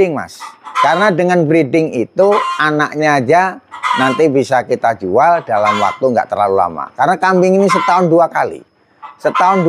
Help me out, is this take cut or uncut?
uncut